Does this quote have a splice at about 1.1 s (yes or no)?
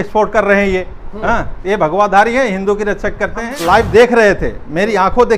no